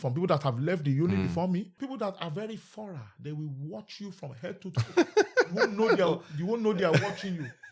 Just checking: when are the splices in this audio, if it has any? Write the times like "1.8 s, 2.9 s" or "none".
1.8 s